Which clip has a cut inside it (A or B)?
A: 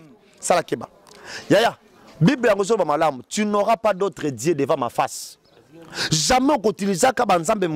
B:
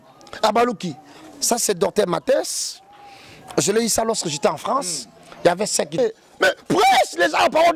B